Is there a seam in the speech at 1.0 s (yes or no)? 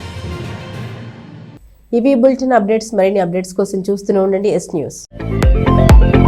no